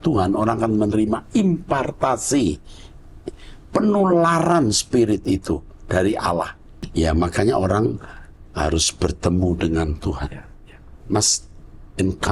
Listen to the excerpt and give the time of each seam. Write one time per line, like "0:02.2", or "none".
0:06.9